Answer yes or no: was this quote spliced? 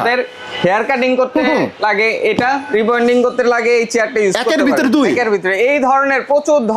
no